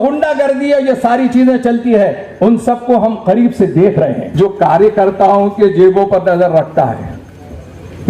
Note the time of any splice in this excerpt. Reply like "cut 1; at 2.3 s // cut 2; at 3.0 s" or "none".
cut 1; at 4.2 s